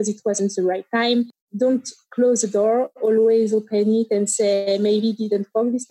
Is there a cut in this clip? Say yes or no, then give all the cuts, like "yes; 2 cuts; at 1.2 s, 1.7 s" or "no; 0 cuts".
yes; 1 cut; at 1.4 s